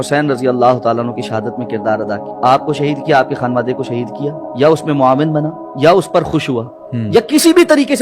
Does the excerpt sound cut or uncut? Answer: cut